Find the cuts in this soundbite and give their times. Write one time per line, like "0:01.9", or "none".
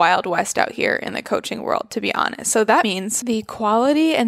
0:02.9